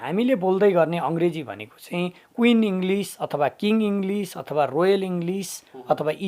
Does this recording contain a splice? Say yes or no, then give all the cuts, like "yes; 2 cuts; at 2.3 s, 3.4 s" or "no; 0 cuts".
no; 0 cuts